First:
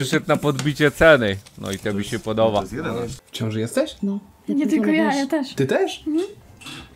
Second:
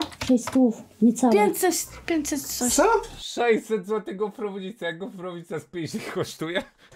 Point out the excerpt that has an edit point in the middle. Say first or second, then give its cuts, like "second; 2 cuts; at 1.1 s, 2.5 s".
first; 1 cut; at 3.1 s